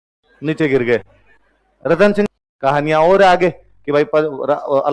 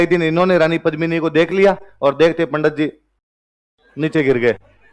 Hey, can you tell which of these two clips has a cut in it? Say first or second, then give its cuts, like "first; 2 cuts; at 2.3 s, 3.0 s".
first; 1 cut; at 2.3 s